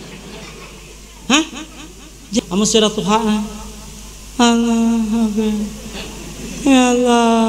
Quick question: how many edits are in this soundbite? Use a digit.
1